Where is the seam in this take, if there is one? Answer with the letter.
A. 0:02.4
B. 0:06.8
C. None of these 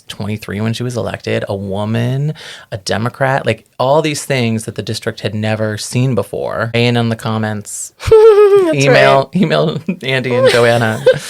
B